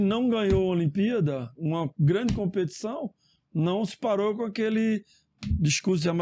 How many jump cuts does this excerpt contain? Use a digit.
0